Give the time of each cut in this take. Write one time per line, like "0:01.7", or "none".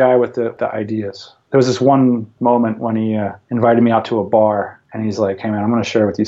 0:01.1
0:02.3
0:03.4
0:04.8